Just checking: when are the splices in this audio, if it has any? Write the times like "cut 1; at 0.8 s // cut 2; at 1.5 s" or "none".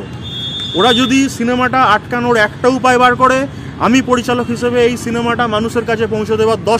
none